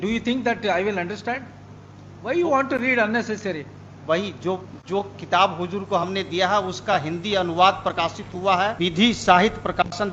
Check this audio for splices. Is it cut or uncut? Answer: uncut